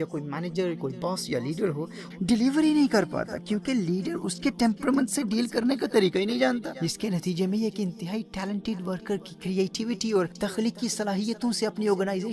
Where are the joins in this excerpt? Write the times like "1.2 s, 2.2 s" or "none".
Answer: 2.1 s, 6.8 s, 10.3 s